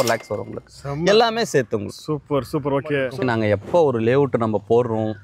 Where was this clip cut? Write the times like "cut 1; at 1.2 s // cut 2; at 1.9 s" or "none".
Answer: cut 1; at 3.1 s